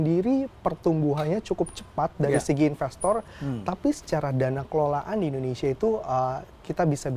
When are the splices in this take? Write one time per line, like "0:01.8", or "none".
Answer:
none